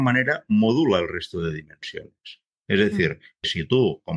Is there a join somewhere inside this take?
no; 0 cuts

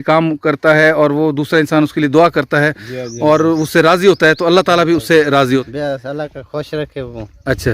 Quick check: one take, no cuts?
no; 1 cut; at 5.6 s

